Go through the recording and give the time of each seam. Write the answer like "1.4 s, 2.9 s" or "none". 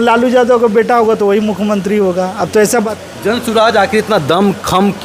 2.9 s